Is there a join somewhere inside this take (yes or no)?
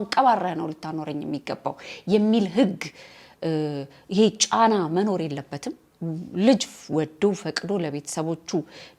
no